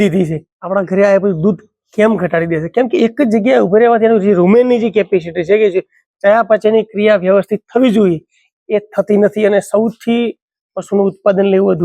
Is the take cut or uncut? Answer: uncut